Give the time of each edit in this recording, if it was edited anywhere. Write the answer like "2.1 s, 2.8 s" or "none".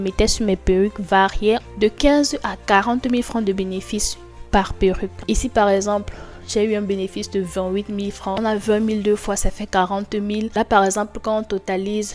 1.6 s, 5.2 s, 8.4 s